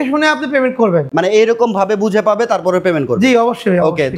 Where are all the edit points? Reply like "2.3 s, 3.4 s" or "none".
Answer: none